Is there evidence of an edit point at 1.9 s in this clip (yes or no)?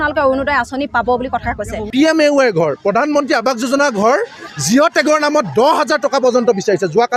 yes